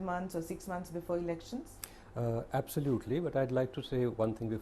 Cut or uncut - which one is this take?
cut